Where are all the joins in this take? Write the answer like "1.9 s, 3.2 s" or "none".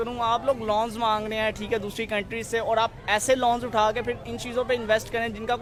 none

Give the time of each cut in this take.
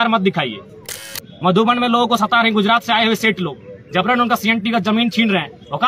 1.1 s

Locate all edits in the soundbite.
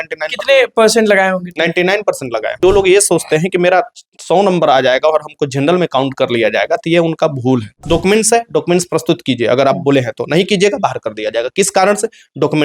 2.6 s, 7.8 s

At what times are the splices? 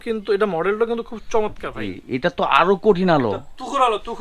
1.8 s

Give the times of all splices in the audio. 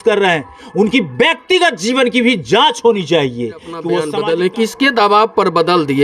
3.7 s

